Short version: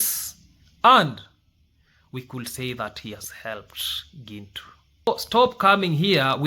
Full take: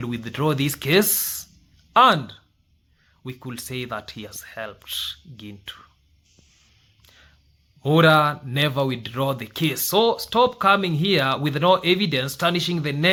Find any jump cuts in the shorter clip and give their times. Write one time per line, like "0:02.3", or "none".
0:05.1